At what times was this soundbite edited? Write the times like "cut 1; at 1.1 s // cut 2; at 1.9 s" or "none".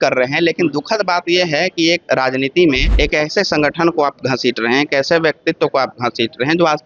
cut 1; at 2.9 s